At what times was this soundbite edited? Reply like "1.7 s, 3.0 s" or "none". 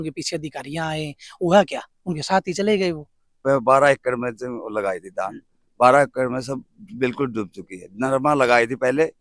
3.4 s